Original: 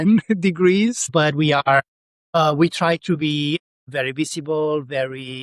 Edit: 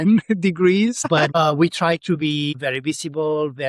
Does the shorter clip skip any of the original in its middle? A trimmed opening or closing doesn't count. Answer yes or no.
yes